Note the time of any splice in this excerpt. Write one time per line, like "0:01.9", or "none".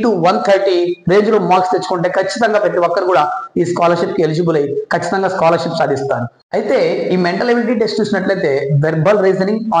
none